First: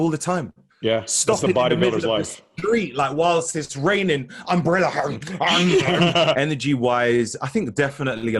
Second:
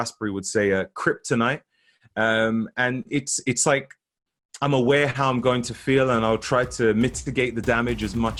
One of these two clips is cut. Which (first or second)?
first